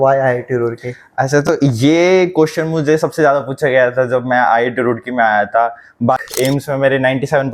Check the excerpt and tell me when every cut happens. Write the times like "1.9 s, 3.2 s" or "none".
6.2 s